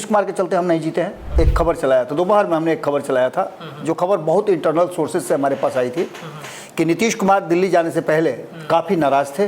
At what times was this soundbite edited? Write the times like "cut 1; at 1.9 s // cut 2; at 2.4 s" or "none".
cut 1; at 1.2 s